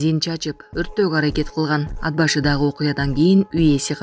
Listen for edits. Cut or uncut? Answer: uncut